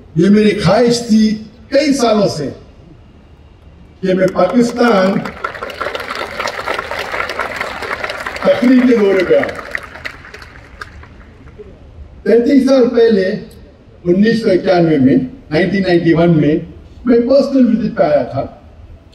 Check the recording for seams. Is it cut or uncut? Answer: uncut